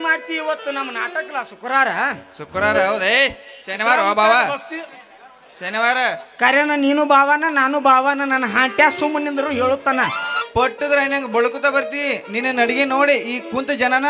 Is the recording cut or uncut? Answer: cut